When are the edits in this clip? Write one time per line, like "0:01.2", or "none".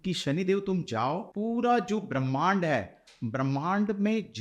0:01.3